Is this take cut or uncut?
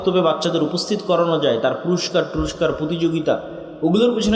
uncut